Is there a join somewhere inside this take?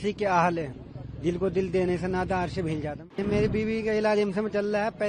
yes; 1 cut; at 3.2 s

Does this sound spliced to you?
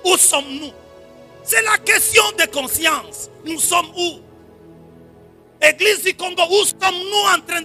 no; 0 cuts

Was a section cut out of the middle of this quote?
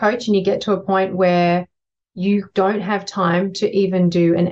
no; 0 cuts

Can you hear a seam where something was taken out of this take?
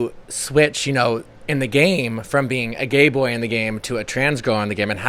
no; 0 cuts

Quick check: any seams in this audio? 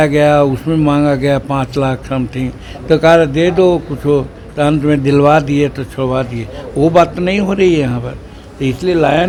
no; 0 cuts

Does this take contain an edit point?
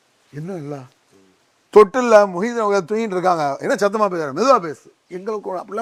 no; 0 cuts

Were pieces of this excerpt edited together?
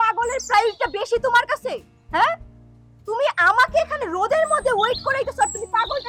no; 0 cuts

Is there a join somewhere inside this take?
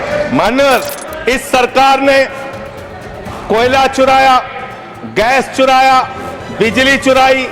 yes; 1 cut; at 1.0 s

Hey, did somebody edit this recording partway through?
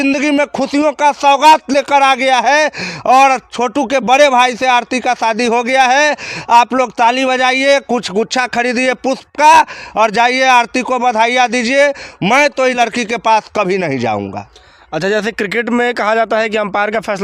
no; 0 cuts

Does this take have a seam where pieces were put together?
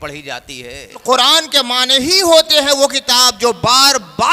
yes; 1 cut; at 1.0 s

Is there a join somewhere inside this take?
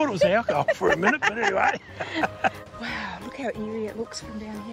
yes; 1 cut; at 2.6 s

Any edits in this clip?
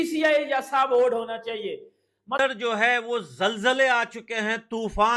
yes; 1 cut; at 2.4 s

